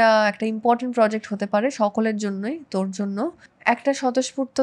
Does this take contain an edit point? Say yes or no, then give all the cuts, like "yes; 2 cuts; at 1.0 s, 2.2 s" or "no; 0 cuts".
yes; 1 cut; at 3.5 s